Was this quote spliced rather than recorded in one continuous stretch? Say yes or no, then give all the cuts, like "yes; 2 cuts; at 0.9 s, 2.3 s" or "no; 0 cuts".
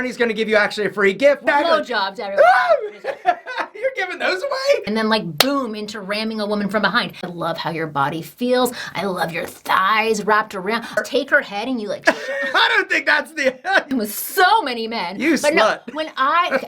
yes; 5 cuts; at 1.4 s, 4.8 s, 7.3 s, 11.0 s, 13.9 s